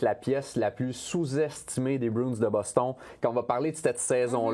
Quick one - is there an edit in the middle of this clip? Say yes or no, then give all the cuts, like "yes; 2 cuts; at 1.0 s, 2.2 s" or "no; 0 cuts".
no; 0 cuts